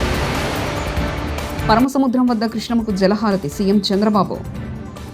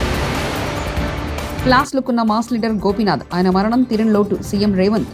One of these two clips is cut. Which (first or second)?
first